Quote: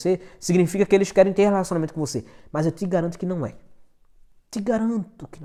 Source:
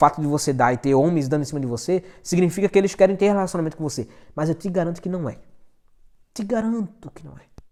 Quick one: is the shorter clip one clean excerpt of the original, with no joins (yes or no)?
yes